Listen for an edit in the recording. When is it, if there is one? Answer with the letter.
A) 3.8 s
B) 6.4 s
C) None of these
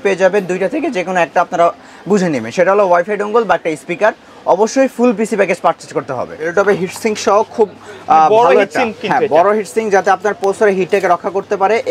B